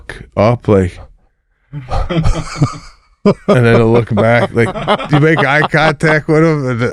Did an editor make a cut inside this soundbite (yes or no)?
no